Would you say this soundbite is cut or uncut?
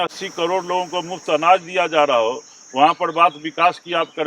uncut